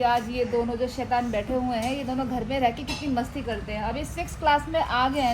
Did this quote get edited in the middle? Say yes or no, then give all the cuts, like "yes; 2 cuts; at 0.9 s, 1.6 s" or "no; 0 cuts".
yes; 1 cut; at 3.7 s